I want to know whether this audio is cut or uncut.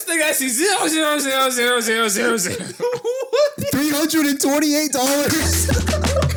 uncut